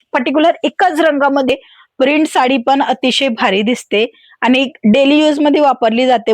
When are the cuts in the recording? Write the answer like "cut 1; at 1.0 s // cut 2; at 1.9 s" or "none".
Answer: cut 1; at 1.5 s